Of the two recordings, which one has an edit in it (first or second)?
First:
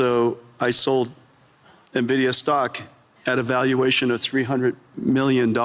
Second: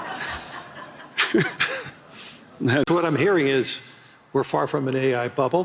second